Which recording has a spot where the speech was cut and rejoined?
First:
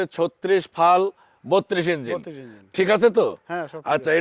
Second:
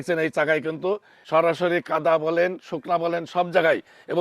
second; 1 cut; at 1.1 s

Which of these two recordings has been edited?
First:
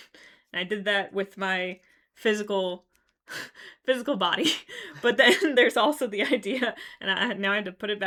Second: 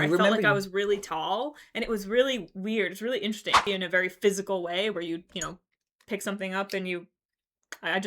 second; 1 cut; at 3.6 s

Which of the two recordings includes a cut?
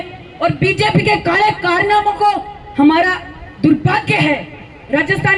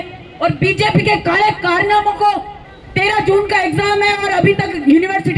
second; 1 cut; at 2.6 s

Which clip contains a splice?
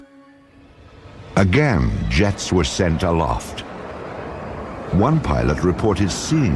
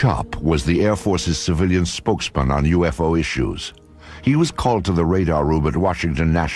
first; 1 cut; at 1.4 s

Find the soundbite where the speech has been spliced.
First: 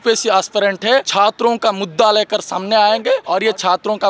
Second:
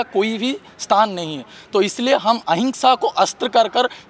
first; 2 cuts; at 1.1 s, 3.2 s

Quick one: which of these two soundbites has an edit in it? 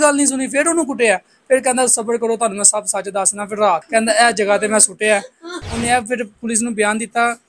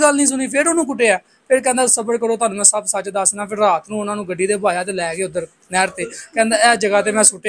first; 2 cuts; at 3.8 s, 5.6 s

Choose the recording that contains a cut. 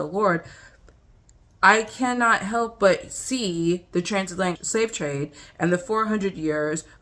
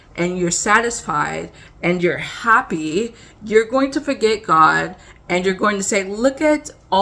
first; 1 cut; at 4.6 s

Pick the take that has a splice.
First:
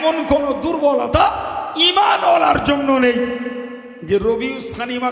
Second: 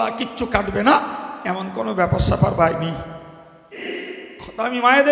second; 1 cut; at 3.9 s

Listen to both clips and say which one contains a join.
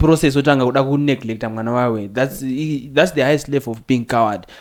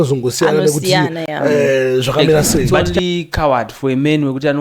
second; 1 cut; at 2.8 s

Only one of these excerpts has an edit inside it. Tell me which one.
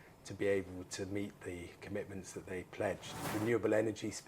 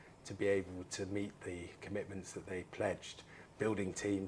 first; 1 cut; at 3.2 s

